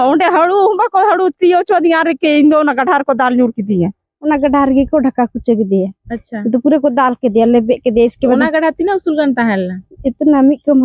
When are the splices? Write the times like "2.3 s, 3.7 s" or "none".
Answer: 4.1 s